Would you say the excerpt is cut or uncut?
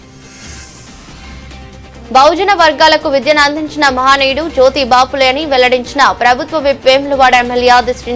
cut